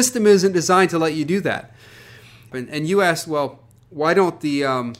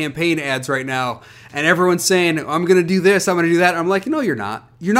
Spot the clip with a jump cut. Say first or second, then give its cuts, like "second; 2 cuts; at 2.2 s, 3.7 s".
first; 1 cut; at 2.5 s